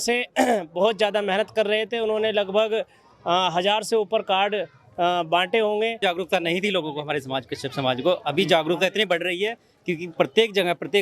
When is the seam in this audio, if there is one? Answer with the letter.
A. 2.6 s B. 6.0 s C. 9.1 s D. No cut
B